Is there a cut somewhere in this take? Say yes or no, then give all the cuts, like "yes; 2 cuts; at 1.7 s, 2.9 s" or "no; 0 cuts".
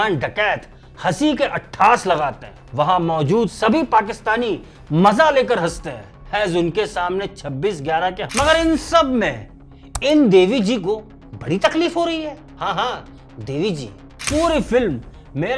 yes; 2 cuts; at 8.2 s, 14.1 s